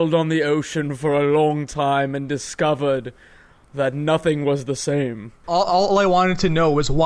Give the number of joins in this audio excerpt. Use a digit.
1